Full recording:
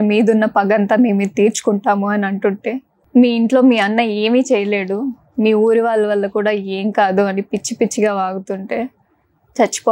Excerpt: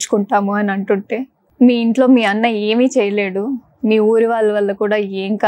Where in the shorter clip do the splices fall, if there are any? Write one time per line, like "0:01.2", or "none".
none